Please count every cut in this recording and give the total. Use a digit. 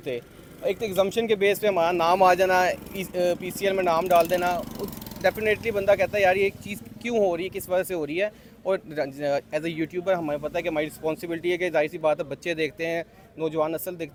0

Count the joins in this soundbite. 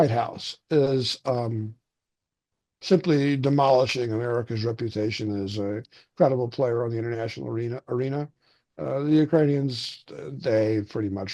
0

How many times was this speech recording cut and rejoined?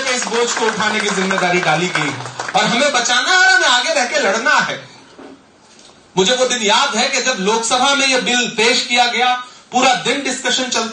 0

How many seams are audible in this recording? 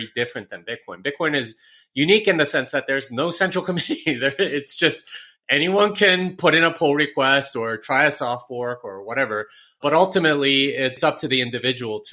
1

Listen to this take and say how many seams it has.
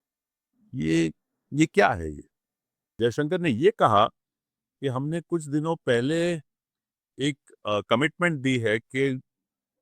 1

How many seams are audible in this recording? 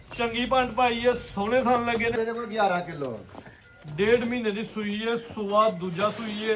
1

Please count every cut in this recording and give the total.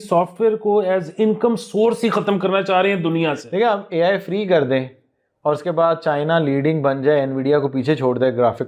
0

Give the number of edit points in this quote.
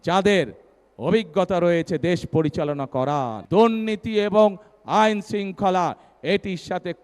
1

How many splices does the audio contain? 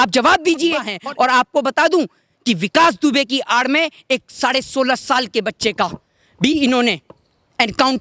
1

